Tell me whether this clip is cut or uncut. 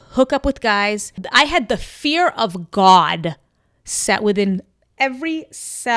cut